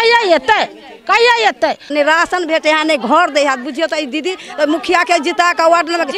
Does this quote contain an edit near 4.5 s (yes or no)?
no